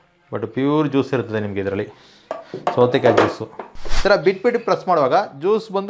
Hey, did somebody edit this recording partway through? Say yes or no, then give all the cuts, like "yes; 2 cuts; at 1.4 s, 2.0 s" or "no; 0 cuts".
yes; 1 cut; at 3.8 s